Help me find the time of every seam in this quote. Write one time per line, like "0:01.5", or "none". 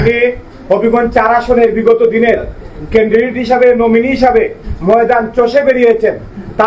none